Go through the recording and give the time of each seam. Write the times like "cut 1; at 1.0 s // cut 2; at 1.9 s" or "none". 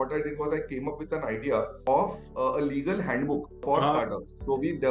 cut 1; at 1.8 s // cut 2; at 3.5 s